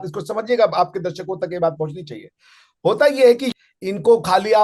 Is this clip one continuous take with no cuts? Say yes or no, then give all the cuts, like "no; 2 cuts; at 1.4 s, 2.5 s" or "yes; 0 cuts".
no; 1 cut; at 3.5 s